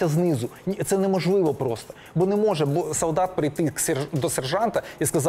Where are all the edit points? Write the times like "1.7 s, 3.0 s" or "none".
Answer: none

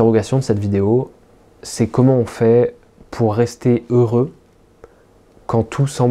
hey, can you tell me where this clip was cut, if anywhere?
none

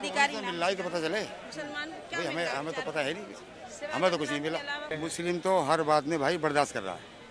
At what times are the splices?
5.0 s

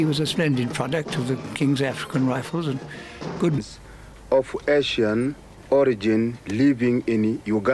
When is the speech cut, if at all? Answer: none

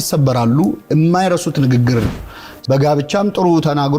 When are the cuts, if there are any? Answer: 2.2 s

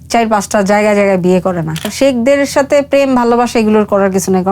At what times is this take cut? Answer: 1.9 s

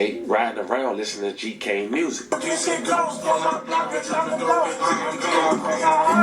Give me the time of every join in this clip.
none

